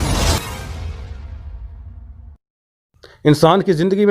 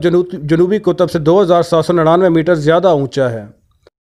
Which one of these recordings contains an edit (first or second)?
first